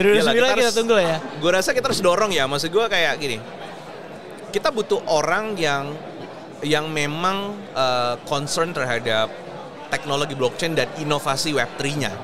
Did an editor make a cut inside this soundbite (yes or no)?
no